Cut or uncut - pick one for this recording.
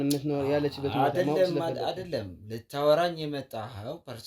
uncut